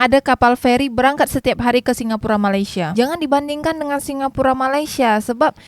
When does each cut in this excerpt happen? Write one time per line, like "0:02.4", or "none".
0:02.9